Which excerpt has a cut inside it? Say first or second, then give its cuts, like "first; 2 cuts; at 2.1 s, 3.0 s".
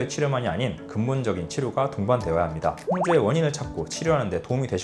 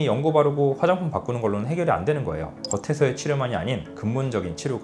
first; 1 cut; at 2.8 s